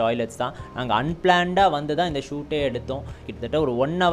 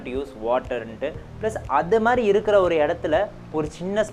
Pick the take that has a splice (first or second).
first